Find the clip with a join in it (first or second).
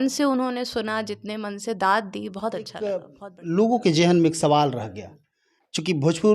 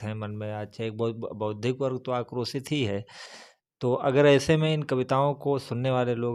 first